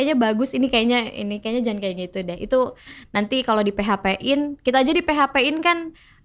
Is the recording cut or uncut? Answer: uncut